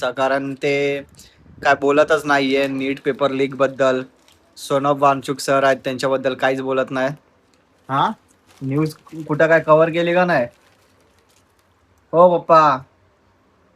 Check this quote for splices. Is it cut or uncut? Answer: uncut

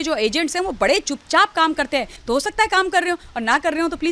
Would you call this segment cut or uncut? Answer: cut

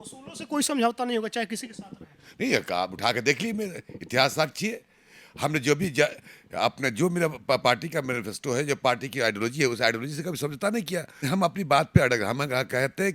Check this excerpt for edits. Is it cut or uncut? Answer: cut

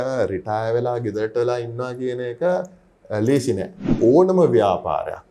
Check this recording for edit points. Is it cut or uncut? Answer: cut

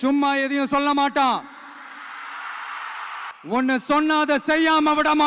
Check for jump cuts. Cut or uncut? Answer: cut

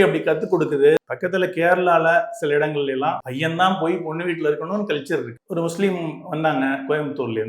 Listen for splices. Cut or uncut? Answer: cut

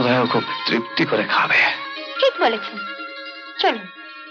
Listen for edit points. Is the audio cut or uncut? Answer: uncut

